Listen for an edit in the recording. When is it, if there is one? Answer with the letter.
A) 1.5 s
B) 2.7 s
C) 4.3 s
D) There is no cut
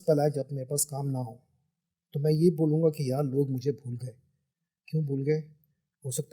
D